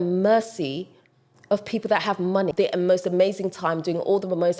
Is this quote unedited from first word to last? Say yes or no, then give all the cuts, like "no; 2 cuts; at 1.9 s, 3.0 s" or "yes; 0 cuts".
no; 1 cut; at 2.5 s